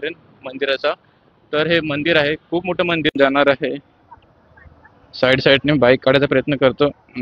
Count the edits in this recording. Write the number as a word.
one